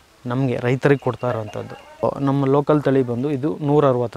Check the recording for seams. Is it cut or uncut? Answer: cut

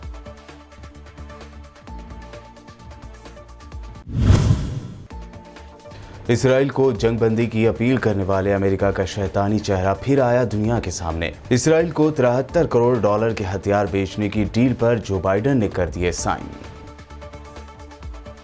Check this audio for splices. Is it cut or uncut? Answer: cut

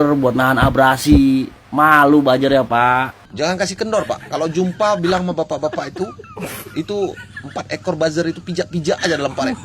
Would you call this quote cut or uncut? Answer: cut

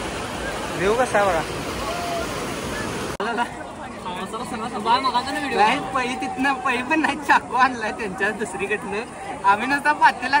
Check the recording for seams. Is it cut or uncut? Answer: cut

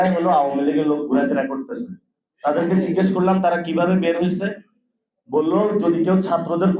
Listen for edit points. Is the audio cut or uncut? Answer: uncut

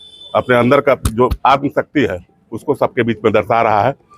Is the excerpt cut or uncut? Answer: uncut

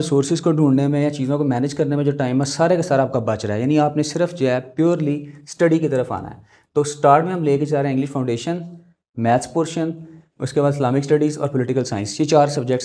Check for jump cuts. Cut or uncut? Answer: uncut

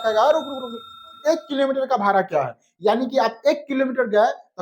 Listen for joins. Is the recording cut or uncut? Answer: cut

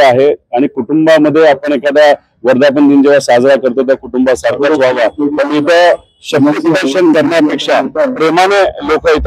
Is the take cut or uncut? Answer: uncut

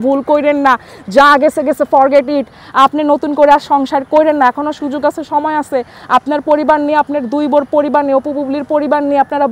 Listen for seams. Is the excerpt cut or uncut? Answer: uncut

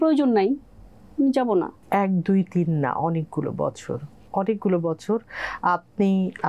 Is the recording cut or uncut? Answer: uncut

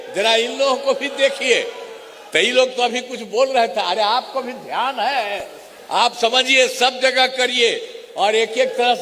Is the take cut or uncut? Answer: uncut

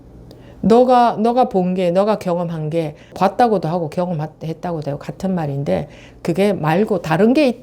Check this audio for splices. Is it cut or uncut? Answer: cut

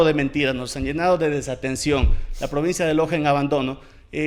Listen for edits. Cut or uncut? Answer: uncut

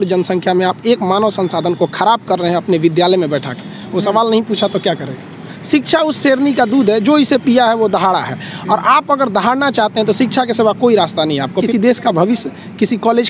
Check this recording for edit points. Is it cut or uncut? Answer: cut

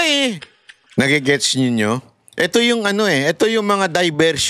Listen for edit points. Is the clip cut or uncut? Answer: cut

